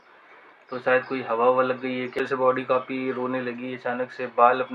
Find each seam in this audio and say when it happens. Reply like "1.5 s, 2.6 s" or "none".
2.2 s